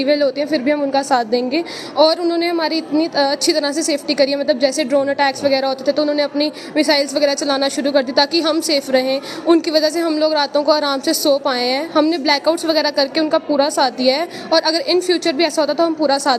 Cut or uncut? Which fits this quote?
uncut